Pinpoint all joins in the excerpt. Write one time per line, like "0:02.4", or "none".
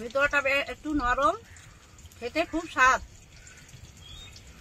none